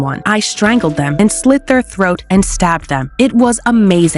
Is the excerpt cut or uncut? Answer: uncut